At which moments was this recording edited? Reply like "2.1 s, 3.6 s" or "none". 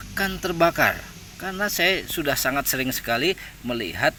none